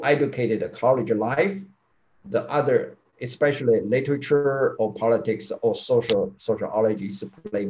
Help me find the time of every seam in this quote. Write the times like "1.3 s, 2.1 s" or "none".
none